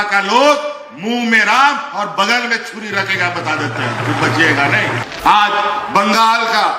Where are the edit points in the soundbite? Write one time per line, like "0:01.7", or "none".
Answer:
0:05.0

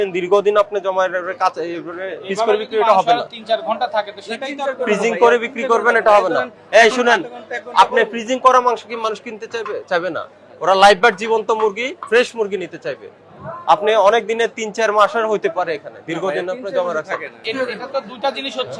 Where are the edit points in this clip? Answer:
0:17.4

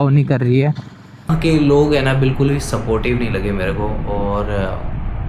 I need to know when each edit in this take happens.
0:01.3

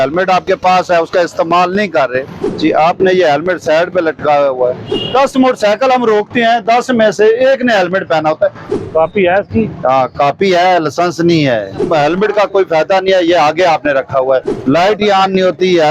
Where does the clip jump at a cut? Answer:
0:02.4
0:04.9
0:08.7
0:11.8
0:14.5

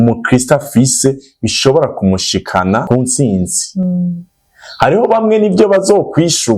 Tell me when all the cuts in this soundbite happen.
0:02.8

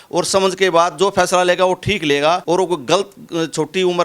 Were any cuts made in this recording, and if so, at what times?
0:02.4

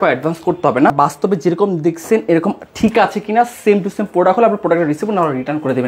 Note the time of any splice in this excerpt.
0:00.9

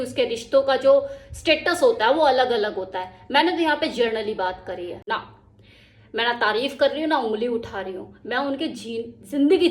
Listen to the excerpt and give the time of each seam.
0:05.1

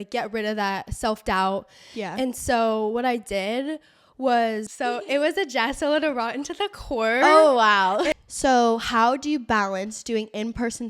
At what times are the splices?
0:04.7
0:08.1

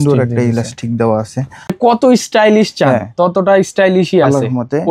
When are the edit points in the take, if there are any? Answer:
0:01.8

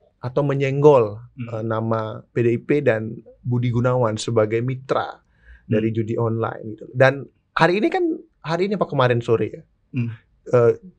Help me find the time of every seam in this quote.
none

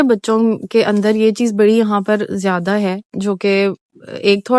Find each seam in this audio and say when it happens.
none

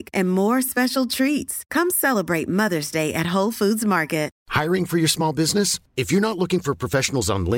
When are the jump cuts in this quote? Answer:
0:04.4

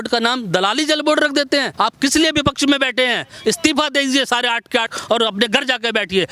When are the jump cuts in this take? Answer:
0:01.7
0:04.9

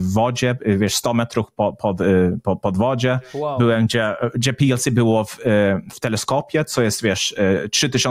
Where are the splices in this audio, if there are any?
none

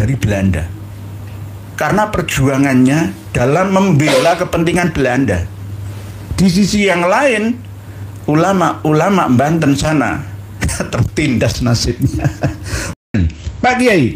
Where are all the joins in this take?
0:13.0

